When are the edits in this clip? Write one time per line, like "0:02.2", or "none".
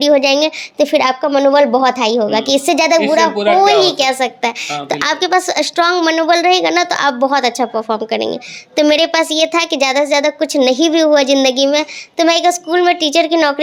none